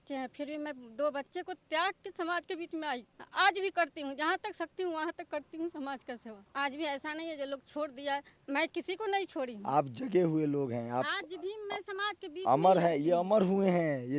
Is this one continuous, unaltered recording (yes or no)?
no